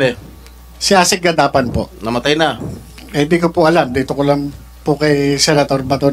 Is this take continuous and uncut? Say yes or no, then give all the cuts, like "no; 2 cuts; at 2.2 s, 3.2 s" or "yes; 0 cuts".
yes; 0 cuts